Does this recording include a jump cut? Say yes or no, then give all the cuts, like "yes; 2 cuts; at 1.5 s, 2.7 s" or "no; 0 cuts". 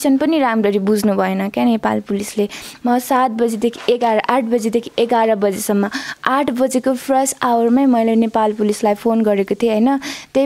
yes; 1 cut; at 2.7 s